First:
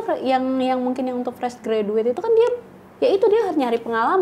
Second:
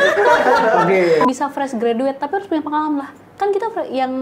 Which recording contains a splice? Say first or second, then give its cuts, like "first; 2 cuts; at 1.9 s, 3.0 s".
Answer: second; 1 cut; at 1.3 s